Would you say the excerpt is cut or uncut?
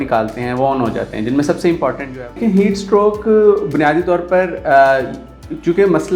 cut